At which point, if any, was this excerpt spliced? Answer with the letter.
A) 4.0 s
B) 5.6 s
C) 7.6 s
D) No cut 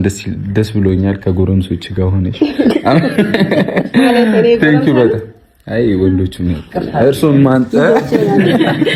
D